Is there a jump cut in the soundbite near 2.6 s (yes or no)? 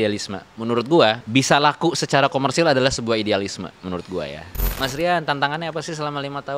no